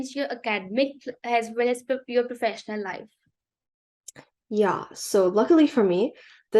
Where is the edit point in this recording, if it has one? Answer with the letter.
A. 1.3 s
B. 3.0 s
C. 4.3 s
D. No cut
D